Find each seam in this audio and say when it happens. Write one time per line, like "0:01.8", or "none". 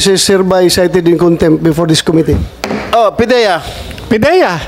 0:02.8